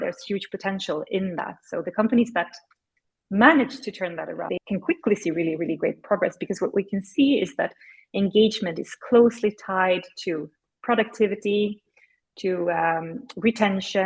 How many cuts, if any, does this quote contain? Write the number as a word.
one